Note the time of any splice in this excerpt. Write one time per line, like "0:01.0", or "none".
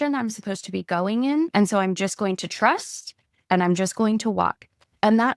0:01.5